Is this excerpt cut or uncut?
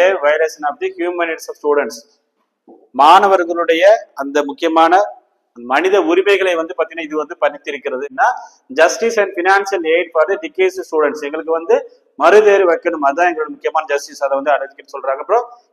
cut